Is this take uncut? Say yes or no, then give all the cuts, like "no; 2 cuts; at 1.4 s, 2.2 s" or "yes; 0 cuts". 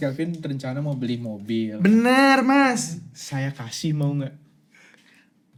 yes; 0 cuts